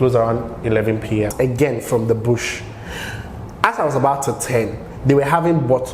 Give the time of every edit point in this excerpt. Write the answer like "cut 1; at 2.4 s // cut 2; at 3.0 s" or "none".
cut 1; at 1.3 s